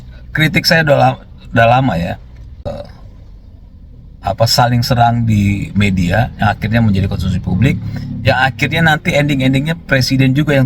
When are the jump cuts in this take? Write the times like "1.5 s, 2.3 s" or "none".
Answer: 2.8 s